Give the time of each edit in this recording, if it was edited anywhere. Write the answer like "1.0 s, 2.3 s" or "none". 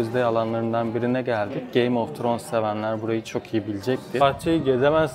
4.2 s